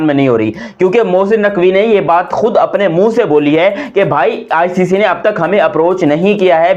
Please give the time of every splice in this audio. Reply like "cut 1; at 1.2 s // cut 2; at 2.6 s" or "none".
none